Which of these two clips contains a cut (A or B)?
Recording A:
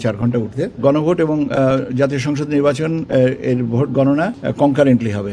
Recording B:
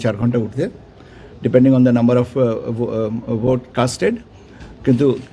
A